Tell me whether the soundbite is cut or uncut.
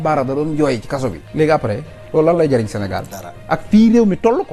uncut